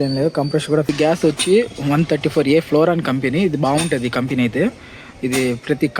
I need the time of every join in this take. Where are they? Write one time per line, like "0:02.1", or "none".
0:00.9